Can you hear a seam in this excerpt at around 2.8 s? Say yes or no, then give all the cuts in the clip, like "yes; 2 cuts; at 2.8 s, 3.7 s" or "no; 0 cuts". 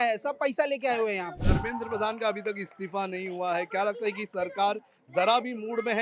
no; 1 cut; at 1.4 s